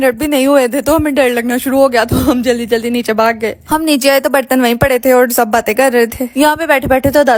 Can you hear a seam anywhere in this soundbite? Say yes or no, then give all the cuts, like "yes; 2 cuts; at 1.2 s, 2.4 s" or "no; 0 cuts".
no; 0 cuts